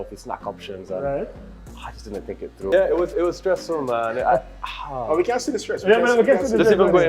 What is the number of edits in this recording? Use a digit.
1